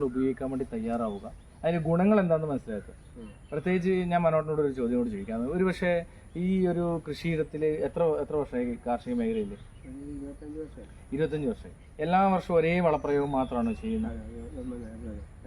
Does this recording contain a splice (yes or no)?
no